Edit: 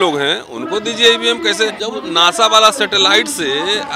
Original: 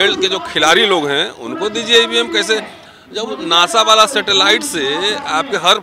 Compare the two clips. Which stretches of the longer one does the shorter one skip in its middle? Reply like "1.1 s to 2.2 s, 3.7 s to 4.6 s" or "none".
2.7 s to 3.2 s